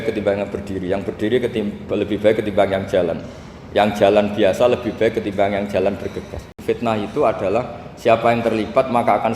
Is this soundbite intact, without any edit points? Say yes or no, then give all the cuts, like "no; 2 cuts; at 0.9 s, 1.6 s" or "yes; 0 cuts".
no; 1 cut; at 6.5 s